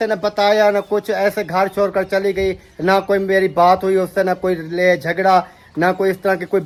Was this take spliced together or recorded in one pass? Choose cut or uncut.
uncut